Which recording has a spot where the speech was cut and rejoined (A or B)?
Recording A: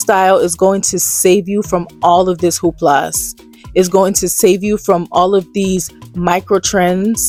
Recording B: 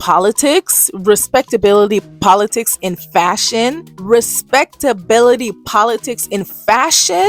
B